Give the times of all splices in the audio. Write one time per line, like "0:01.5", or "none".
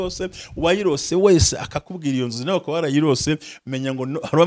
none

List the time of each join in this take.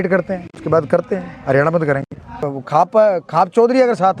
0:02.4

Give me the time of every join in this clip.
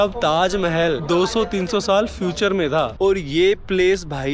0:01.0
0:03.1

